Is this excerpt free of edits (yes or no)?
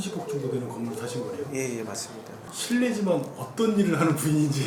yes